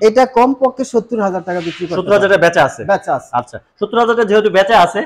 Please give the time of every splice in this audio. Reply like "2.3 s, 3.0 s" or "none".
none